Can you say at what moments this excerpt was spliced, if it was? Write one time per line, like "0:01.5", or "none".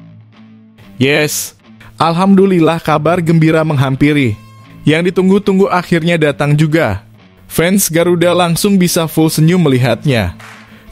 0:01.0